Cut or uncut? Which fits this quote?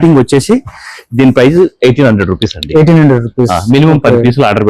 uncut